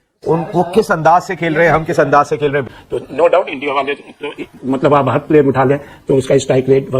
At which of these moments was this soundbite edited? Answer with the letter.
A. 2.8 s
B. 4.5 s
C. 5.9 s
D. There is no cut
A